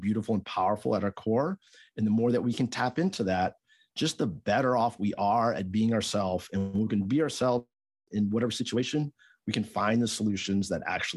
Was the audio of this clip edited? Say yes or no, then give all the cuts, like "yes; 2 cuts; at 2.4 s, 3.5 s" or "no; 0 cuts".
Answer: no; 0 cuts